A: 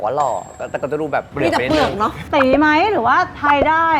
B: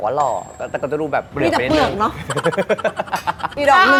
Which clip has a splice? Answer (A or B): A